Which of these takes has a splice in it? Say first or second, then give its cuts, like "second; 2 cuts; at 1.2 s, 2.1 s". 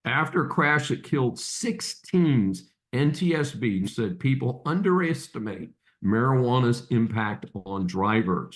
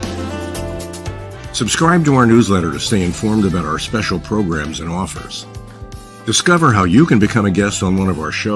first; 1 cut; at 3.9 s